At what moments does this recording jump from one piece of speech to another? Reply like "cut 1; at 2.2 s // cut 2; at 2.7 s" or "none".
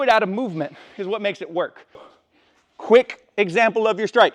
cut 1; at 2.1 s

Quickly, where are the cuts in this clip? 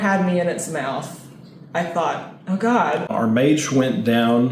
cut 1; at 3.1 s

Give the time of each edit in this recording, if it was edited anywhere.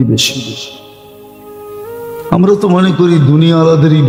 none

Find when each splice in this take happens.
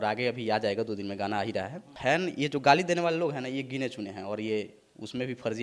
cut 1; at 1.8 s

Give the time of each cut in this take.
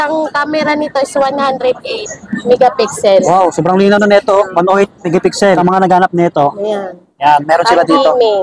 cut 1; at 5.6 s

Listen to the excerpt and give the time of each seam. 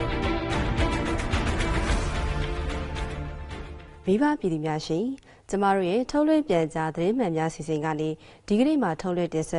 cut 1; at 2.5 s

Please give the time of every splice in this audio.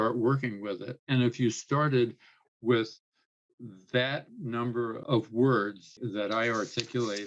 cut 1; at 5.0 s // cut 2; at 5.9 s

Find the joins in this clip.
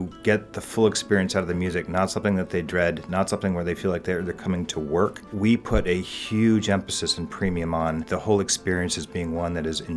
cut 1; at 5.2 s // cut 2; at 8.1 s

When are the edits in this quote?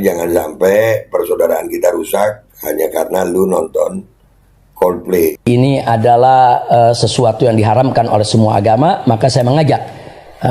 cut 1; at 5.4 s

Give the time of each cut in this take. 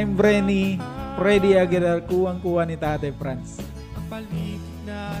none

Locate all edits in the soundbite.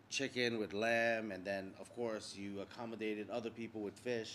none

